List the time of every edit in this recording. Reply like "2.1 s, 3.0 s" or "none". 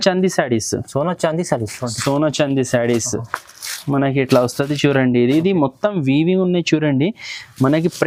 none